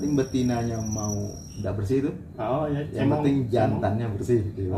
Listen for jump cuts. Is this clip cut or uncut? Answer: cut